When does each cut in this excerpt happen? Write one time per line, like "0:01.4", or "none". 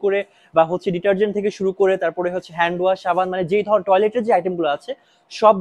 none